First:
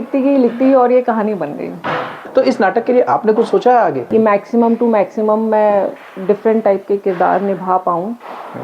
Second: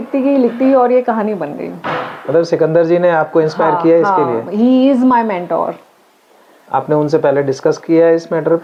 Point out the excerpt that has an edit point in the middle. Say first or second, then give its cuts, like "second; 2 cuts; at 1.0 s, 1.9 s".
first; 2 cuts; at 2.2 s, 4.0 s